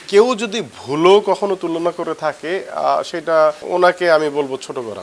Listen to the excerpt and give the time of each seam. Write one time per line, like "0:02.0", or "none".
0:03.6